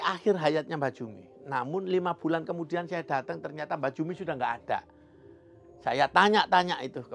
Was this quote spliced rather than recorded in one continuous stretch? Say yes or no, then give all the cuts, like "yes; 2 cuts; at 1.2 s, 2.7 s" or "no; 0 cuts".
no; 0 cuts